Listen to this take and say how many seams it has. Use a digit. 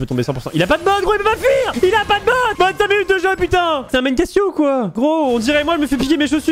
3